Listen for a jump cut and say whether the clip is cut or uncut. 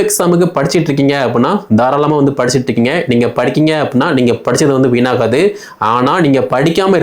uncut